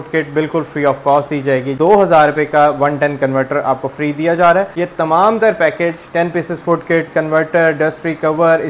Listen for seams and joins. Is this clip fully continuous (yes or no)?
no